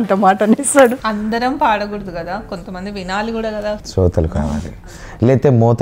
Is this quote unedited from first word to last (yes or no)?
no